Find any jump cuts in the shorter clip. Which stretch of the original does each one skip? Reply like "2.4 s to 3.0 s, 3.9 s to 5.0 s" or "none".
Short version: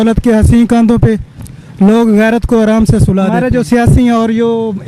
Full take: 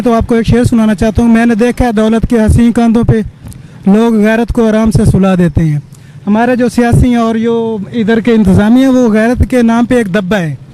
5.4 s to 6.4 s